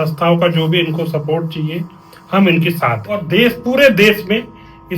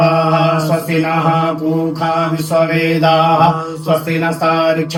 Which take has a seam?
first; 1 cut; at 3.1 s

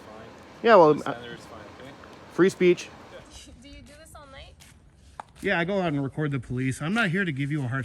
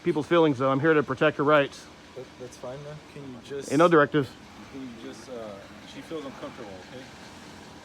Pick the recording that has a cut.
first; 1 cut; at 3.2 s

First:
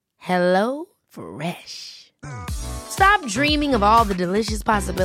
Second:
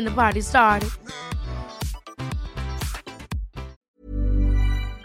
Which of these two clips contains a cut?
second; 1 cut; at 3.9 s

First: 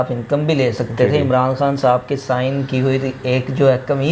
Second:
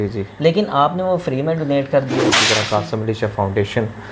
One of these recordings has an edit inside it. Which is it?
second; 1 cut; at 2.4 s

